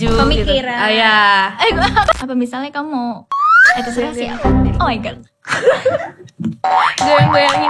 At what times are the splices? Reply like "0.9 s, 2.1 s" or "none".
2.1 s